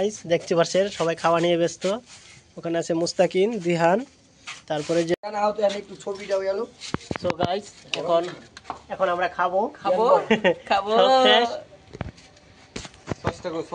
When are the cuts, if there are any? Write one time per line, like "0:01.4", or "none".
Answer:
0:05.1
0:11.3